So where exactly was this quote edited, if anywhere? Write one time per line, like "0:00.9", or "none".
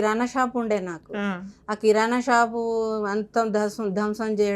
none